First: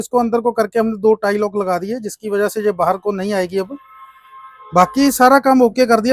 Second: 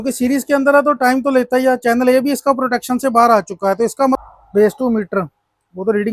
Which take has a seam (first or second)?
second